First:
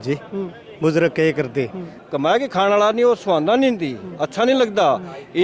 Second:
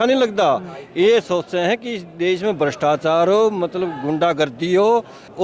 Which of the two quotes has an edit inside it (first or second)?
first